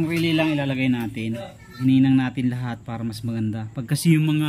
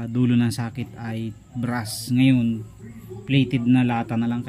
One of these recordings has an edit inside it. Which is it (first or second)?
first